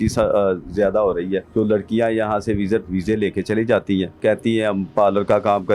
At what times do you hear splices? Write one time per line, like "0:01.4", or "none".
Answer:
0:04.2